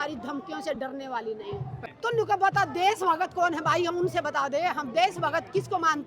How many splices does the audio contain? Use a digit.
1